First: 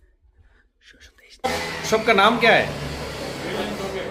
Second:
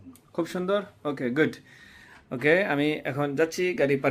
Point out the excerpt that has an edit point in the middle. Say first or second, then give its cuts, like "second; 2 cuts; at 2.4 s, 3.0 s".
first; 1 cut; at 1.4 s